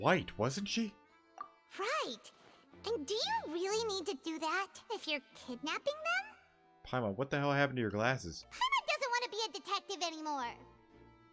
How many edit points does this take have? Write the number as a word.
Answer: one